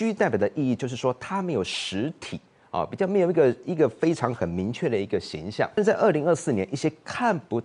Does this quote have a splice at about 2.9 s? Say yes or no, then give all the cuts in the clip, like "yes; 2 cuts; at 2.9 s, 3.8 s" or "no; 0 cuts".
no; 1 cut; at 5.8 s